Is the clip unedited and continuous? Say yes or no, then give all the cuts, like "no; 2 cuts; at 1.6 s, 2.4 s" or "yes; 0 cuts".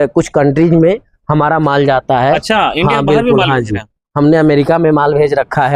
yes; 0 cuts